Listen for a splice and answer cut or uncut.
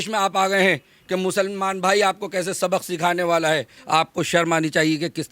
cut